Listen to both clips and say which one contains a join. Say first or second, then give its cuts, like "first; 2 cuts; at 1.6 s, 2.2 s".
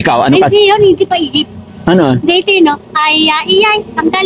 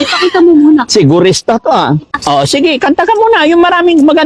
second; 1 cut; at 2.2 s